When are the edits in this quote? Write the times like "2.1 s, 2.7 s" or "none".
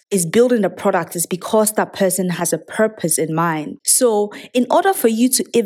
none